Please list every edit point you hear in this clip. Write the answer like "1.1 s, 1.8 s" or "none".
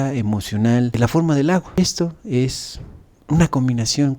1.8 s